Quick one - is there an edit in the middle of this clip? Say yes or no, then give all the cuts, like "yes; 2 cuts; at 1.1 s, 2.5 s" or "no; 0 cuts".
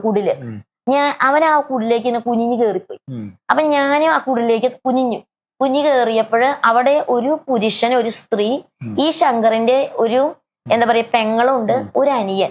no; 0 cuts